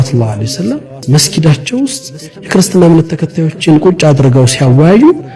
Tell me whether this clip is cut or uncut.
cut